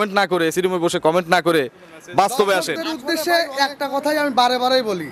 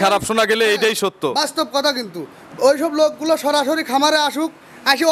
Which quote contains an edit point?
first; 1 cut; at 2.9 s

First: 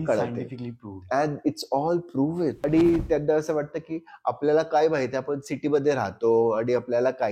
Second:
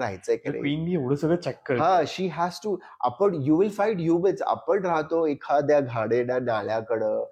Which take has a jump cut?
first; 1 cut; at 2.6 s

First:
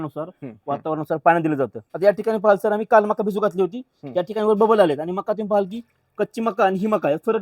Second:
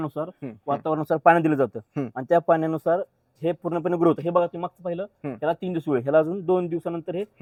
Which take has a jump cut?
first; 1 cut; at 1.8 s

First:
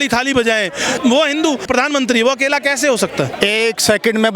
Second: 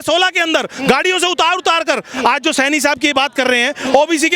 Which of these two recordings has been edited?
first; 3 cuts; at 1.0 s, 1.7 s, 3.3 s

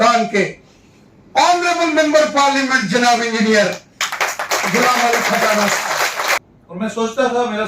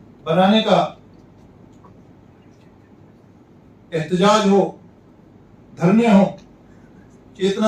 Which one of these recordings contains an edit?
first; 1 cut; at 6.5 s

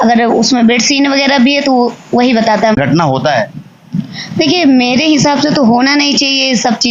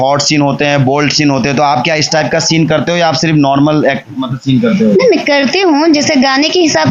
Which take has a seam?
first; 1 cut; at 2.8 s

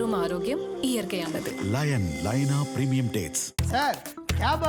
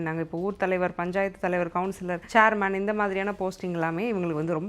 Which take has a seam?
second; 1 cut; at 2.1 s

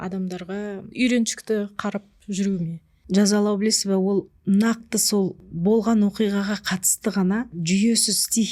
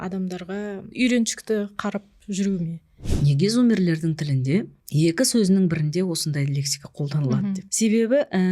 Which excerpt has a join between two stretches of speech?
second; 1 cut; at 2.9 s

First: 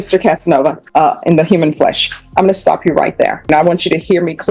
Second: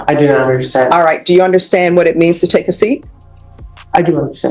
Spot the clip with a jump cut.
first; 2 cuts; at 0.8 s, 3.5 s

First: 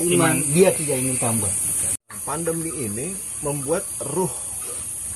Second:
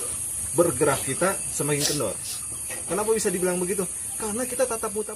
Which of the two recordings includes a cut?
first; 1 cut; at 2.0 s

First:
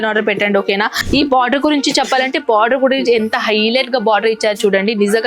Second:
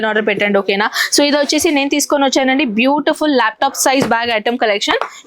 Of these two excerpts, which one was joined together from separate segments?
first; 1 cut; at 1.0 s

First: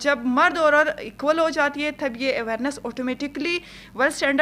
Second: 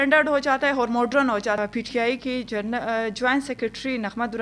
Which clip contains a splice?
second; 1 cut; at 1.6 s

